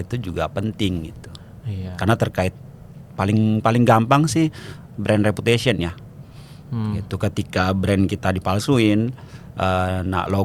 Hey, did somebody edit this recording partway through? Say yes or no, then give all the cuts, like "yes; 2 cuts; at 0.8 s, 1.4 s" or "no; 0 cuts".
no; 0 cuts